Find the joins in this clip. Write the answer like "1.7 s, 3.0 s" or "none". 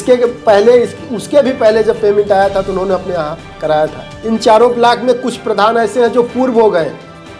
4.1 s